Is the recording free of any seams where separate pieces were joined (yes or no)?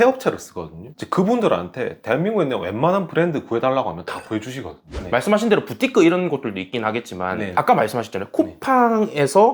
no